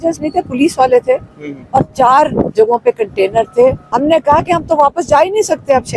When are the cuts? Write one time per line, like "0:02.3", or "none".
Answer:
0:03.9